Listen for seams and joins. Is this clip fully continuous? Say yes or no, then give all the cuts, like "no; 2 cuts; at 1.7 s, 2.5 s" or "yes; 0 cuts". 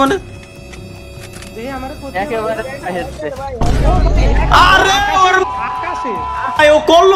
yes; 0 cuts